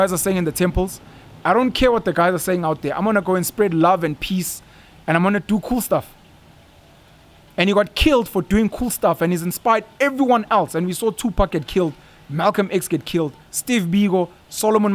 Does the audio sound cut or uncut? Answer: uncut